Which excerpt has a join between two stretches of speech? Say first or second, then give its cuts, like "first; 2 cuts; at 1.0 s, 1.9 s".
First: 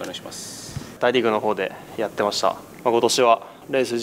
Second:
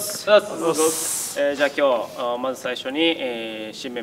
first; 2 cuts; at 1.0 s, 2.7 s